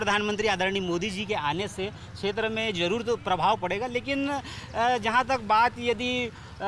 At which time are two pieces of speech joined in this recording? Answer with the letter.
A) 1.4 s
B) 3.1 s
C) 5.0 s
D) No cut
D